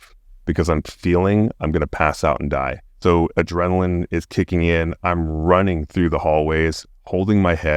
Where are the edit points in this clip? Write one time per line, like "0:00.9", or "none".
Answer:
none